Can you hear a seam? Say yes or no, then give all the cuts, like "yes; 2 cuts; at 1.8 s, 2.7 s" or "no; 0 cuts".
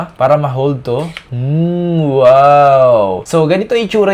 no; 0 cuts